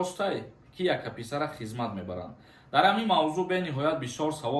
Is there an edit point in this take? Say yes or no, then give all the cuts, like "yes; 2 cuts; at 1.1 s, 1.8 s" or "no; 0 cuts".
no; 0 cuts